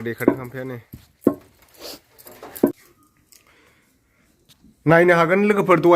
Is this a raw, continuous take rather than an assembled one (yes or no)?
no